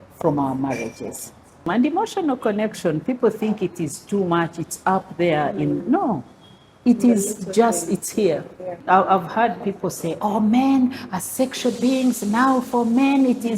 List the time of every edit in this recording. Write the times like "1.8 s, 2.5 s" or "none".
1.7 s, 8.8 s